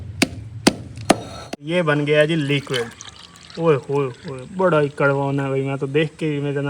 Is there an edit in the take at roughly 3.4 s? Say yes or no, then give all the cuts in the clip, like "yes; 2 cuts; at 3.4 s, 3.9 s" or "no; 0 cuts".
no; 1 cut; at 1.4 s